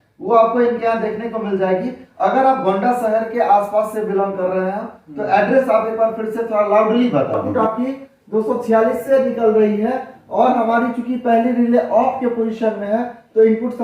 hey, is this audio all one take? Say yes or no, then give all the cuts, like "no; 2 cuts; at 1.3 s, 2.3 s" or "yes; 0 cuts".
no; 1 cut; at 7.4 s